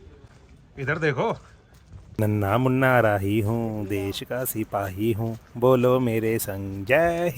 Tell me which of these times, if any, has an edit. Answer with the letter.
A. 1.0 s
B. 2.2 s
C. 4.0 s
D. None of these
B